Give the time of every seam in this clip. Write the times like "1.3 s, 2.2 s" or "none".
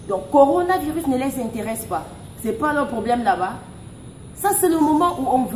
none